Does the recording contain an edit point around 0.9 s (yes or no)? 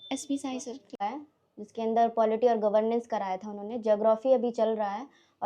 yes